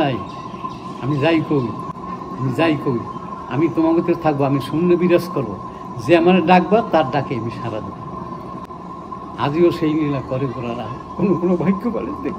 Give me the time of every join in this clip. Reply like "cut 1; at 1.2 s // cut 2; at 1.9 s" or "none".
cut 1; at 1.9 s // cut 2; at 8.7 s